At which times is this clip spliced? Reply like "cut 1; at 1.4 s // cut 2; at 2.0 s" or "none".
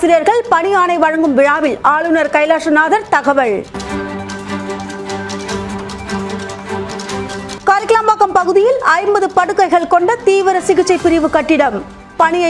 none